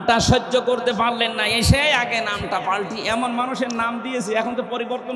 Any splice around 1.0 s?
no; 0 cuts

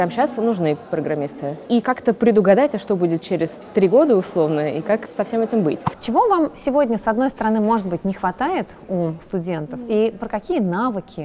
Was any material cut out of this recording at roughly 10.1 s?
no; 3 cuts; at 1.6 s, 5.1 s, 5.9 s

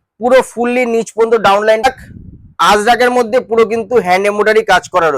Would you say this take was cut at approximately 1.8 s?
yes; 1 cut; at 1.8 s

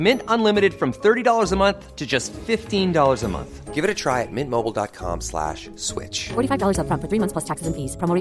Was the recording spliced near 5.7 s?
no; 0 cuts

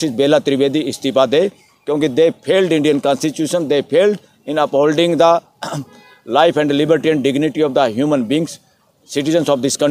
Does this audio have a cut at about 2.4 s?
no; 0 cuts

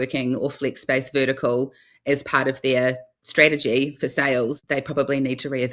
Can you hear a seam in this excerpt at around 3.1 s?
no; 1 cut; at 4.6 s

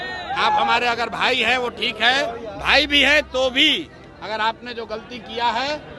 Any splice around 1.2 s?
no; 0 cuts

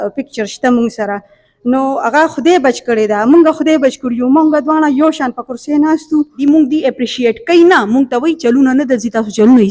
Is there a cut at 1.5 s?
no; 1 cut; at 6.3 s

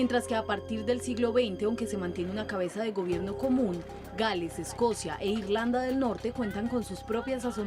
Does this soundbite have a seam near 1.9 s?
no; 1 cut; at 5.7 s

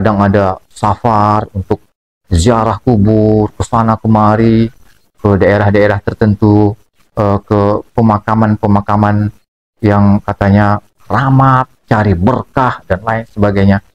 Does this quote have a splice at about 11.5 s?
no; 0 cuts

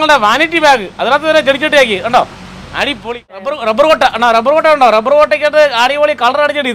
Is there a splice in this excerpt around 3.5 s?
yes; 1 cut; at 3.5 s

